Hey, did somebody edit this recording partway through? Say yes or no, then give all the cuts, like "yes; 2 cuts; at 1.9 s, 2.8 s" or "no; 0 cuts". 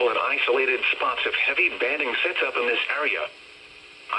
no; 0 cuts